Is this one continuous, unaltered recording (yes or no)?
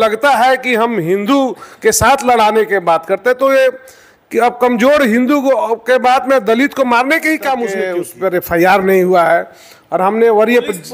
no